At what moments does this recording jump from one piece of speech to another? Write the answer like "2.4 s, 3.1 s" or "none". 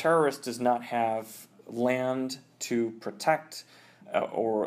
none

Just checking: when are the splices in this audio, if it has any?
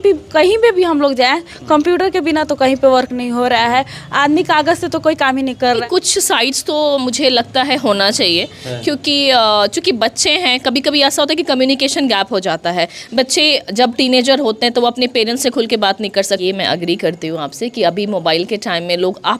5.8 s, 16.4 s

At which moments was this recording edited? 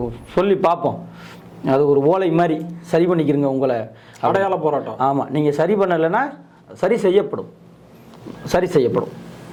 none

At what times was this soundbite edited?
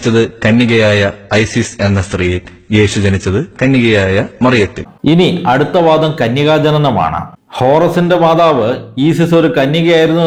none

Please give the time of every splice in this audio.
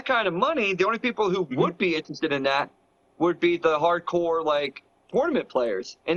none

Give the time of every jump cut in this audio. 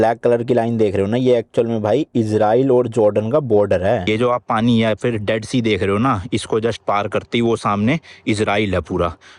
4.0 s

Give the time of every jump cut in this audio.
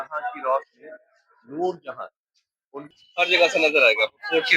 2.9 s

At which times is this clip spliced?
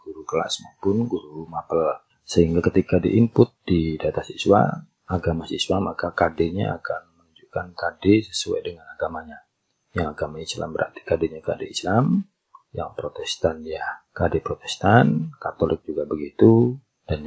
none

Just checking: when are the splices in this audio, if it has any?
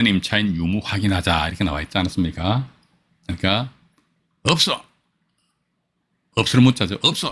none

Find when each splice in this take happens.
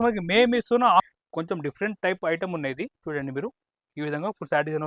1.0 s

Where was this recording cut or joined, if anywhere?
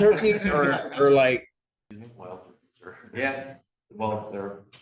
1.7 s

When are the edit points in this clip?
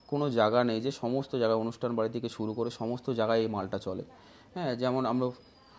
none

